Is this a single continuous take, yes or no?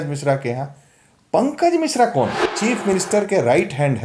no